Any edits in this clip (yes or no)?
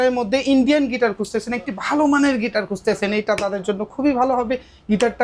no